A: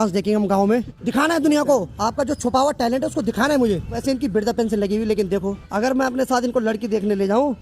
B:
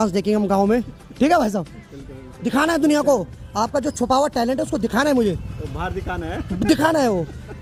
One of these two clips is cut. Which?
A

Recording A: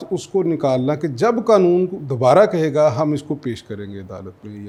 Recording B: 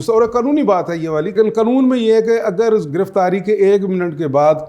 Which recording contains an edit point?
B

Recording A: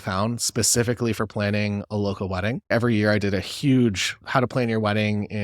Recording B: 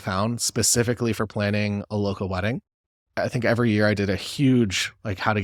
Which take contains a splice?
A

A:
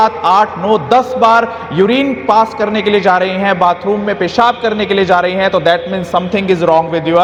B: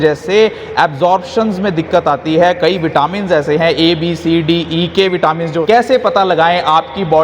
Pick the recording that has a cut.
B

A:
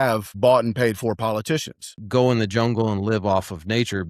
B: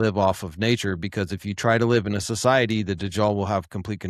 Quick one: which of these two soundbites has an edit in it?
A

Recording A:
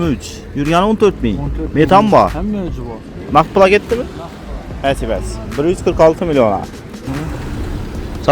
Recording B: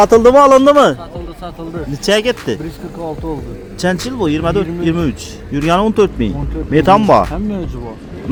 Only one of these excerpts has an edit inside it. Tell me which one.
A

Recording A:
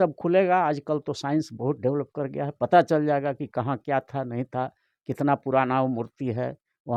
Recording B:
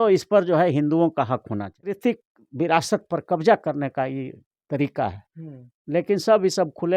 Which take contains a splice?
B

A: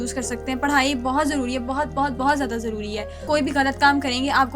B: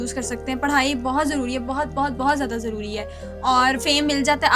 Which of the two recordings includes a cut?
A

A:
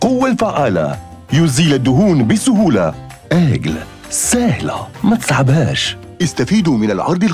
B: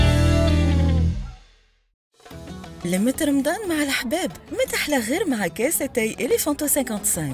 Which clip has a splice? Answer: B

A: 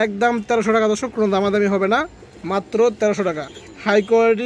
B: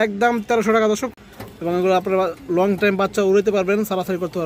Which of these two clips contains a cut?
B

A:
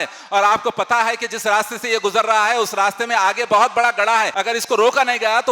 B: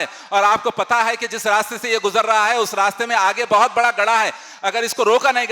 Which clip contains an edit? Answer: A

